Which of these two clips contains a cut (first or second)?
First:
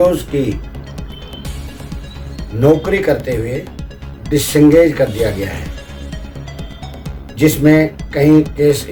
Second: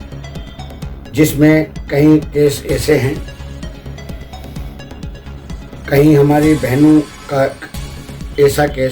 second